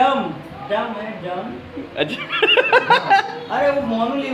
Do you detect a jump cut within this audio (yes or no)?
no